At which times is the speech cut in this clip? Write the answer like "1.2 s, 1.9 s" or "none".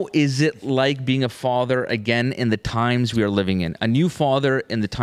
none